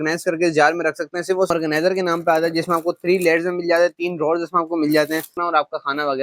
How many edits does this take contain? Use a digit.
2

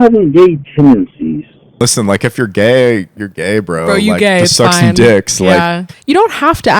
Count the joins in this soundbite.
2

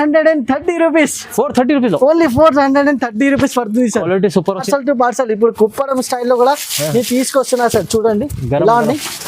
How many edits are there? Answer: 1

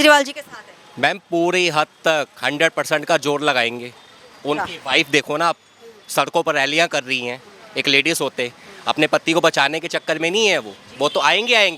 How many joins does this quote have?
0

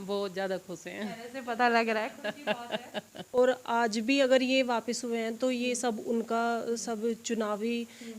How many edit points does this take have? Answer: 1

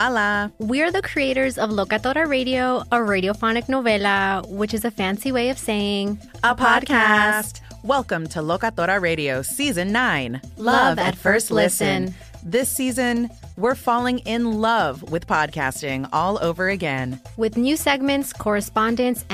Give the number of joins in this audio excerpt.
0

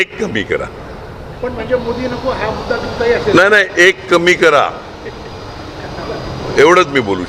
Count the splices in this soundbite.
0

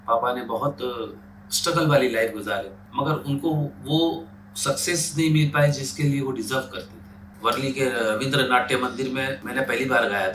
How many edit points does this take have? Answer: 3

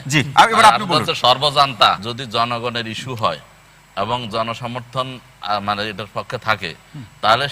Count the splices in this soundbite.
1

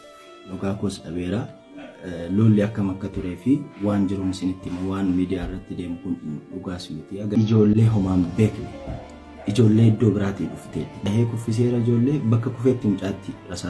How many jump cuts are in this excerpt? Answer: 2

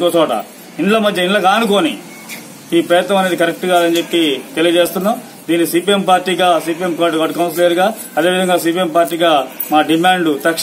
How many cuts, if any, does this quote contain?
0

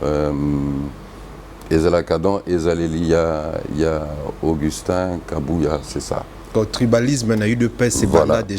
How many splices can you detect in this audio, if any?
1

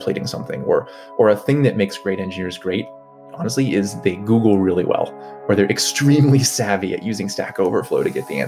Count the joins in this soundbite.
1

